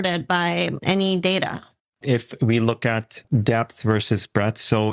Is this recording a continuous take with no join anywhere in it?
no; 2 cuts; at 1.8 s, 3.1 s

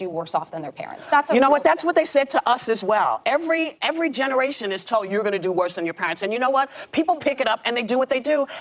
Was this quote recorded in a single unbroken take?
no; 1 cut; at 1.4 s

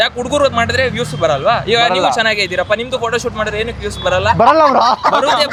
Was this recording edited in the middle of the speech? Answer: no; 0 cuts

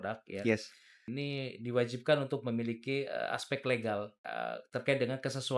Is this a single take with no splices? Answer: no; 2 cuts; at 1.1 s, 4.2 s

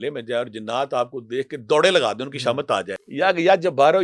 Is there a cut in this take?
yes; 1 cut; at 3.0 s

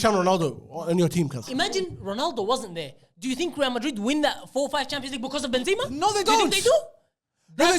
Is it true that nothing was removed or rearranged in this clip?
no; 1 cut; at 1.4 s

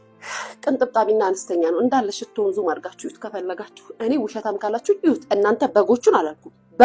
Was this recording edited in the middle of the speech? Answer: no; 0 cuts

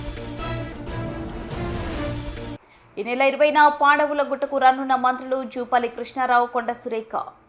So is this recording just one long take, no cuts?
yes; 0 cuts

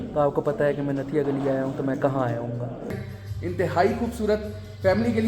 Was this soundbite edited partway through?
yes; 1 cut; at 2.9 s

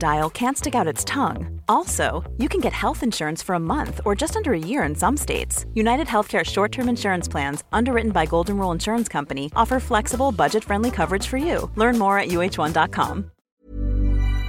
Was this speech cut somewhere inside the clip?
yes; 1 cut; at 13.4 s

